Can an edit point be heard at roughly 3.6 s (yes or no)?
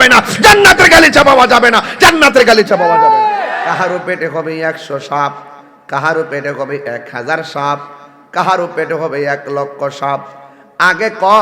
yes